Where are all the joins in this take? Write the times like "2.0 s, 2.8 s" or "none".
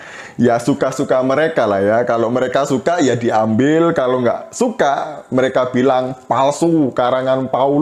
6.9 s